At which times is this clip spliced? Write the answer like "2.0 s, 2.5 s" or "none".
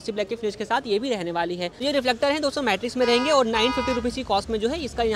1.8 s